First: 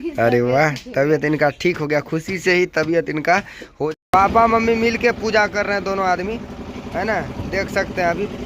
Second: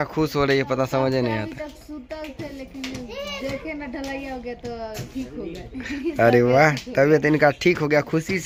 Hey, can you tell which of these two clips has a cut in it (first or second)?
first